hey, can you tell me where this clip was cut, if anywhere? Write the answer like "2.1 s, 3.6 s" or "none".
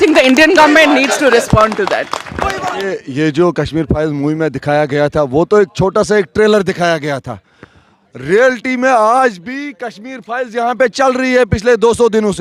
2.7 s